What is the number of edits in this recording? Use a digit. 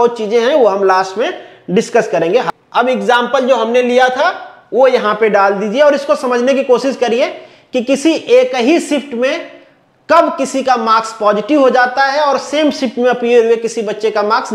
1